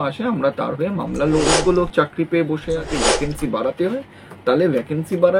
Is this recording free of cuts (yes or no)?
no